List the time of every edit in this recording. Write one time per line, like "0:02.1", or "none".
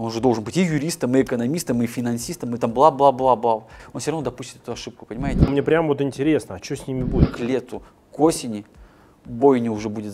0:03.8
0:05.5
0:07.3